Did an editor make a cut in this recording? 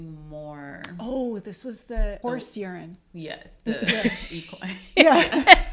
yes; 1 cut; at 2.2 s

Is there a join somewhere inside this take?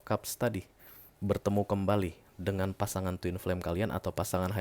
no; 0 cuts

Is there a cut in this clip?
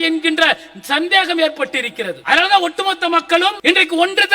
yes; 2 cuts; at 2.2 s, 3.6 s

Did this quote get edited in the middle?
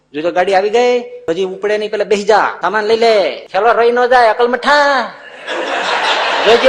yes; 3 cuts; at 1.1 s, 2.6 s, 3.4 s

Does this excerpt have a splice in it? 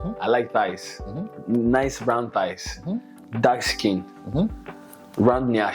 no; 0 cuts

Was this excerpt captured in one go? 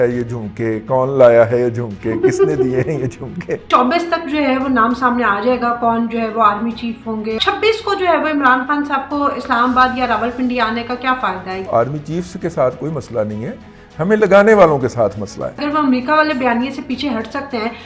no; 4 cuts; at 3.7 s, 7.4 s, 11.7 s, 15.6 s

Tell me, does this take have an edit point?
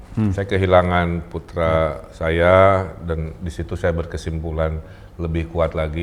no; 0 cuts

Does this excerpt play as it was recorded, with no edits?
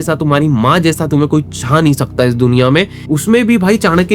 no; 1 cut; at 3.0 s

